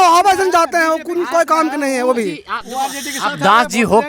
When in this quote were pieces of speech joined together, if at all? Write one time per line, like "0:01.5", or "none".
none

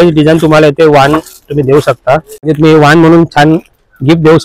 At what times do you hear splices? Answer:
0:02.4

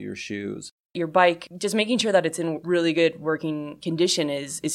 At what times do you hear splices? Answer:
0:01.0
0:01.5
0:02.6
0:03.7

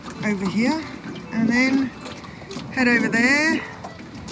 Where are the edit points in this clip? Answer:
none

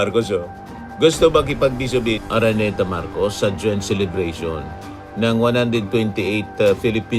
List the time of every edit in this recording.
0:02.2

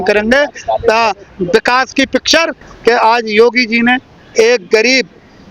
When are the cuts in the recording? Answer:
0:02.6

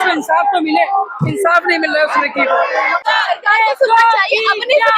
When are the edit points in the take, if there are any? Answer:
0:03.0

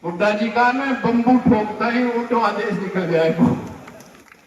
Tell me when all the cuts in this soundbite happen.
none

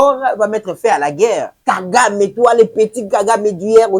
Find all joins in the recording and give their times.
0:01.5

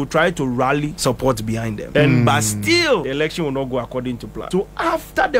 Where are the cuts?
0:01.2
0:03.0
0:04.3

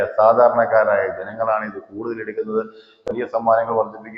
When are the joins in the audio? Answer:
0:03.1

